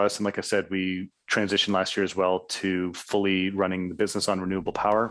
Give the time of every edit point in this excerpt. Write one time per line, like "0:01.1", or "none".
none